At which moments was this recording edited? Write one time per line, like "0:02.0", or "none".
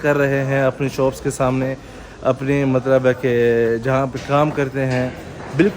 none